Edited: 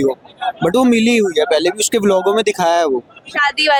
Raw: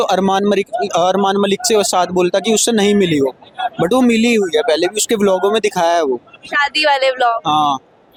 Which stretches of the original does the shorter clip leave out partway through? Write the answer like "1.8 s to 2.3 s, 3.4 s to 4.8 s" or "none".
none